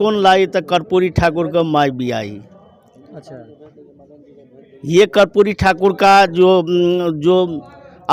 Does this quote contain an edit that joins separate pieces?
no; 0 cuts

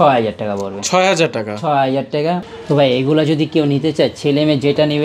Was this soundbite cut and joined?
yes; 1 cut; at 2.4 s

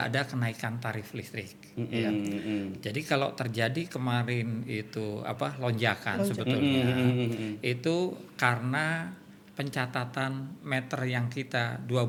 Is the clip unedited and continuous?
yes; 0 cuts

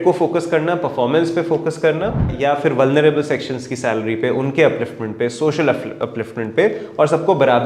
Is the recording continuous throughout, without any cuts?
no; 1 cut; at 2.3 s

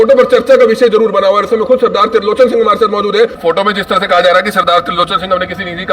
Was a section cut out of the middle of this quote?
yes; 1 cut; at 3.4 s

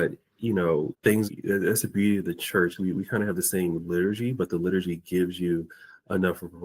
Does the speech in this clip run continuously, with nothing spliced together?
no; 1 cut; at 1.3 s

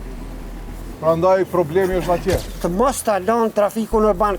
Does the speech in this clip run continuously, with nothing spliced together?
no; 1 cut; at 2.5 s

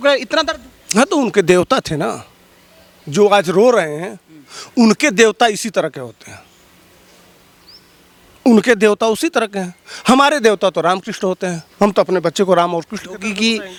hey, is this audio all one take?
yes; 0 cuts

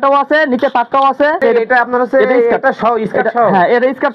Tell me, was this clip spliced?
yes; 1 cut; at 1.4 s

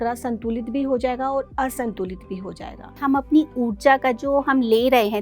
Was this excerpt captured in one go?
no; 1 cut; at 2.9 s

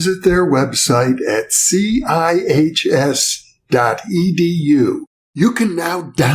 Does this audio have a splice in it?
no; 0 cuts

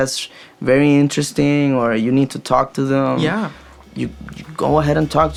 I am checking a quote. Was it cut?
no; 0 cuts

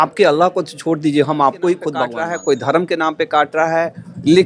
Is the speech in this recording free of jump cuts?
no; 1 cut; at 2.2 s

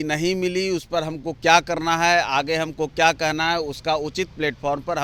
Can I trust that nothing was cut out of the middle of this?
yes; 0 cuts

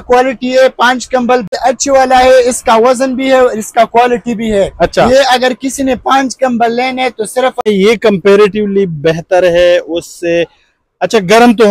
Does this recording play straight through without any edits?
no; 2 cuts; at 1.5 s, 7.6 s

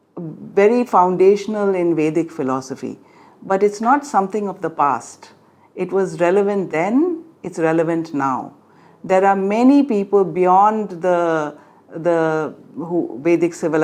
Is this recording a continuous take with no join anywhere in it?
yes; 0 cuts

